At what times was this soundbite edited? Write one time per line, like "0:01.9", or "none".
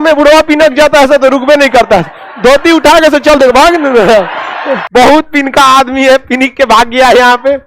0:04.8